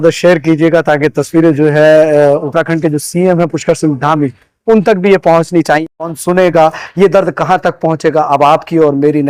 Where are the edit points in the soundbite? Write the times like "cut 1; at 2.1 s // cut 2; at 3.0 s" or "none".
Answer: none